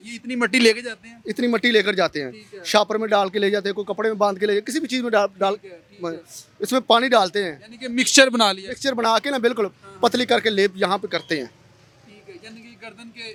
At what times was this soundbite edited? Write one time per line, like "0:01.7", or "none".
none